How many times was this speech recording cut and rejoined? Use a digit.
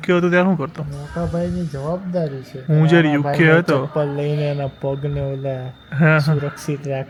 0